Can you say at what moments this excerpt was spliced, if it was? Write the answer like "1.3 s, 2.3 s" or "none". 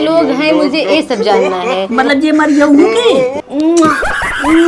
3.4 s